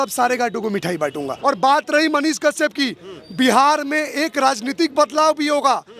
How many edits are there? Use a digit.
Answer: 1